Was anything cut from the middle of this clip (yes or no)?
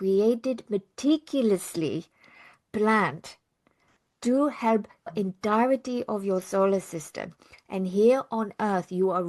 yes